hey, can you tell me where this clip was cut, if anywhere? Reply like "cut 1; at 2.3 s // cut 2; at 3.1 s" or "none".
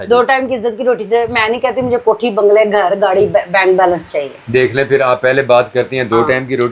none